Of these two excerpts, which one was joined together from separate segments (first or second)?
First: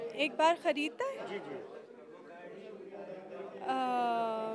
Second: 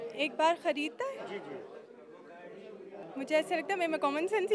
second